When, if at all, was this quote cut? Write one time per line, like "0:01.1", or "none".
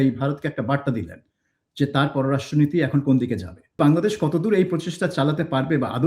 0:03.8